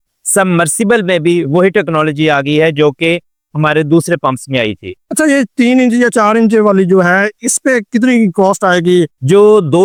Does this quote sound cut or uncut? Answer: uncut